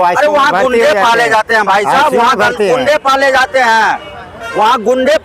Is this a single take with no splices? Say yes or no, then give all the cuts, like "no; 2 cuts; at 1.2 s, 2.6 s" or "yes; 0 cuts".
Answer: yes; 0 cuts